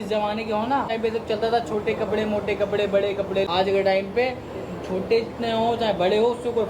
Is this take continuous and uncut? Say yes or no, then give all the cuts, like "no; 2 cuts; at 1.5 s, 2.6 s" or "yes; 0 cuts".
no; 2 cuts; at 0.9 s, 3.5 s